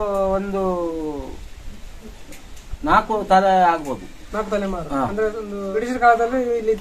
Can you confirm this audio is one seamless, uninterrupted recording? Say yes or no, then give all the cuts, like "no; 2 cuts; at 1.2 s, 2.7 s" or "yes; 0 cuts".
no; 1 cut; at 5.7 s